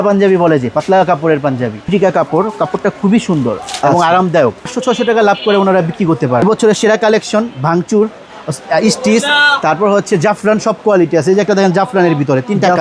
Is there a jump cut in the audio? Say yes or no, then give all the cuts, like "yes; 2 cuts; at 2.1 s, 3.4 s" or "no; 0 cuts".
yes; 3 cuts; at 1.9 s, 4.7 s, 6.4 s